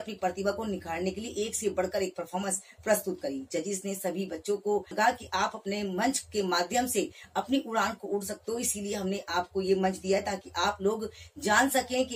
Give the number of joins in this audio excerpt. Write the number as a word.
one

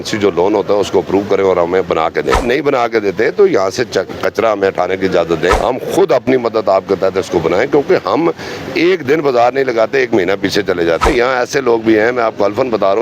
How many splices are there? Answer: three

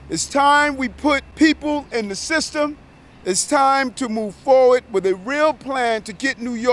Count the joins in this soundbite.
one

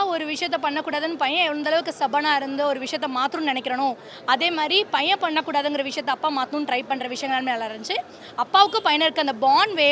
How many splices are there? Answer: zero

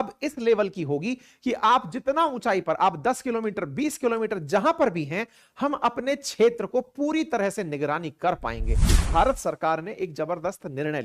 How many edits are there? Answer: one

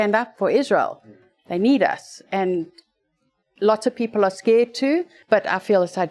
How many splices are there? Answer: one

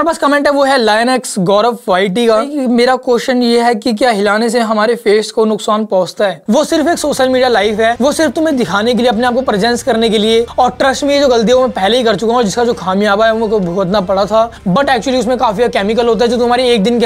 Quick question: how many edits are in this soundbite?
five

